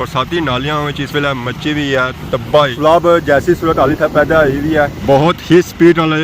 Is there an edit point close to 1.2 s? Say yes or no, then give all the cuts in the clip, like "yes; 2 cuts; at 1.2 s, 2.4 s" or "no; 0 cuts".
no; 2 cuts; at 2.7 s, 5.0 s